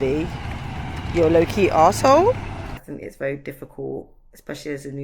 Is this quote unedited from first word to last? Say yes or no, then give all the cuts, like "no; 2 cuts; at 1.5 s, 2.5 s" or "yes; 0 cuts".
no; 1 cut; at 2.8 s